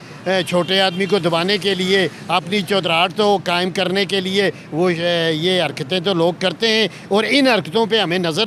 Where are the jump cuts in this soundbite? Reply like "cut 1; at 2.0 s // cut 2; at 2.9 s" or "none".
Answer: none